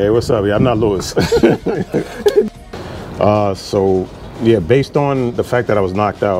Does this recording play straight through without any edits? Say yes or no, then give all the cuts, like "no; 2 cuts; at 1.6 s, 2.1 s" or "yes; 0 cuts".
no; 1 cut; at 2.5 s